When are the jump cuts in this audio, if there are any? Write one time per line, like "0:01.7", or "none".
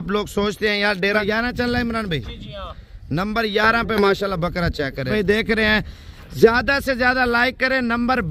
0:01.2
0:05.1